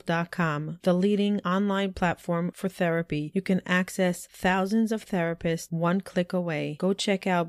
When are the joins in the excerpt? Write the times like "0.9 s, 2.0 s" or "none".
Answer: none